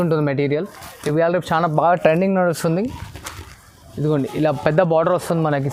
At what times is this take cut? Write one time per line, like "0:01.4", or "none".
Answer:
none